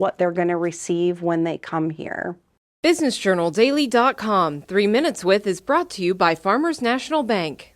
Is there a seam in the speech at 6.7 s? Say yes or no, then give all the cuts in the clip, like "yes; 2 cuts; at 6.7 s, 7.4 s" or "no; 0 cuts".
no; 1 cut; at 2.4 s